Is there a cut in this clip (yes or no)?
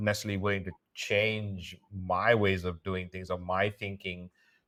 no